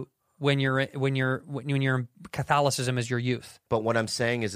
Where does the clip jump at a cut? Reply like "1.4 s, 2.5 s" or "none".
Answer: 3.6 s